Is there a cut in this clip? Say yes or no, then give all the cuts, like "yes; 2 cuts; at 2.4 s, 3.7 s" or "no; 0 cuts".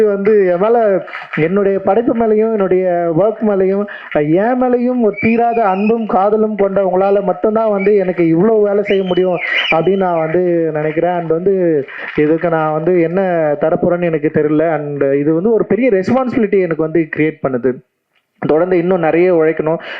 no; 0 cuts